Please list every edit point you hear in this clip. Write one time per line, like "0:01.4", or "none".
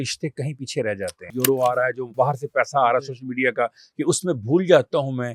0:01.3
0:02.0